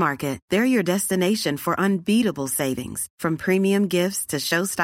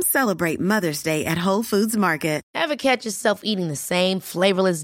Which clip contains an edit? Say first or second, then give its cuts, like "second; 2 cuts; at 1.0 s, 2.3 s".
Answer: second; 1 cut; at 2.4 s